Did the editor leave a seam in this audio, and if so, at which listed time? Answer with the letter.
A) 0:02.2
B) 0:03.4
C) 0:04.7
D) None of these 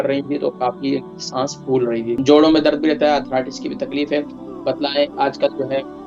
A